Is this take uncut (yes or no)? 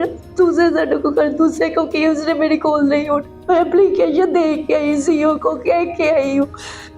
no